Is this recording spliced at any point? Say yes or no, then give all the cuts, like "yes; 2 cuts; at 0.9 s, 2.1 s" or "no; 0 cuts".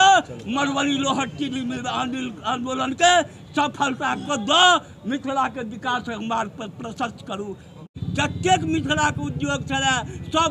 yes; 1 cut; at 7.9 s